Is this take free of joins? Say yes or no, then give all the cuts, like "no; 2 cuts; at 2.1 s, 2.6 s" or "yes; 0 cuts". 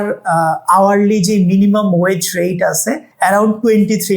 no; 1 cut; at 3.1 s